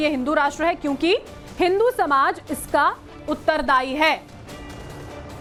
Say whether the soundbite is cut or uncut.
uncut